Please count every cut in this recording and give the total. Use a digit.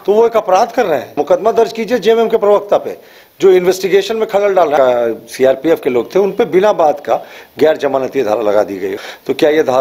3